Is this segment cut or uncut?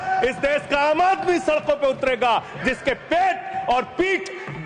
uncut